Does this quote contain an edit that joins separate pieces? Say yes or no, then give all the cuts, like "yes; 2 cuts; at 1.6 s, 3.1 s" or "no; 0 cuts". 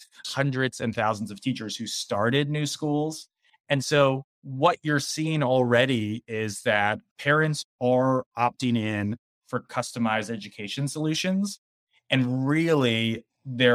no; 0 cuts